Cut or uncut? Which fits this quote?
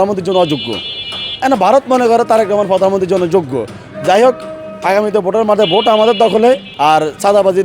cut